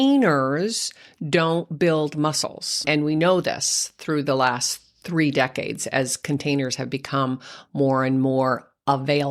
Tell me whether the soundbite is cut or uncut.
cut